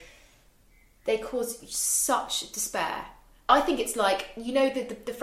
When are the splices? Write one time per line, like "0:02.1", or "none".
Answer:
0:03.5